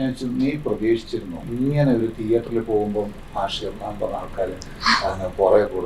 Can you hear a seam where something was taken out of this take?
yes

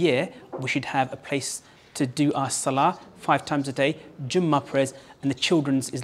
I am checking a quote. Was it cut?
no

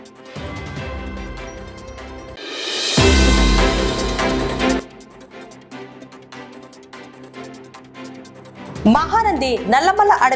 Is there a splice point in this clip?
yes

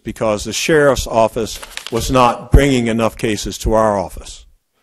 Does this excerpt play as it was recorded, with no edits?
yes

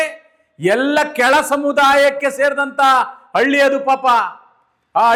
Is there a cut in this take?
no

